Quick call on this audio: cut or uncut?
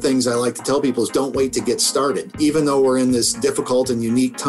cut